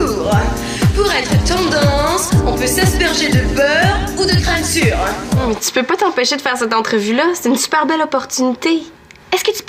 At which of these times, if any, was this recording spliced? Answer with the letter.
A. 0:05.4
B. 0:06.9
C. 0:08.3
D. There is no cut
A